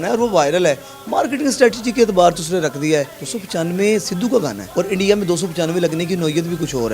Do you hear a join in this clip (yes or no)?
yes